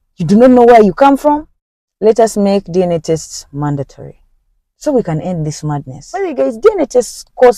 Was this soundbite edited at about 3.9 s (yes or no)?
no